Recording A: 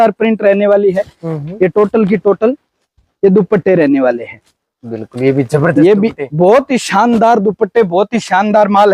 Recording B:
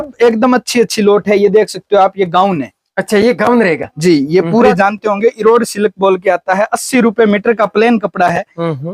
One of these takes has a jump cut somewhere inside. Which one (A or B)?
B